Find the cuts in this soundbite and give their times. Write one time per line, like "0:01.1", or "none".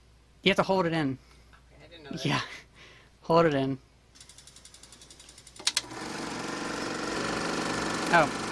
0:07.2